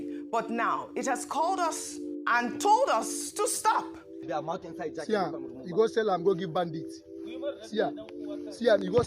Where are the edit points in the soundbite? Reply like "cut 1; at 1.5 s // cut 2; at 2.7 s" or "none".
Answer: cut 1; at 4.2 s

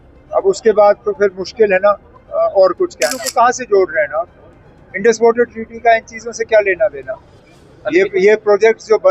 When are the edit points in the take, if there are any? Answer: cut 1; at 3.2 s

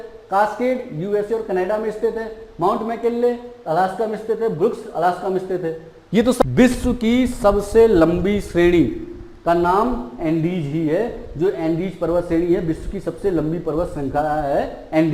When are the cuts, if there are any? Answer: cut 1; at 6.4 s

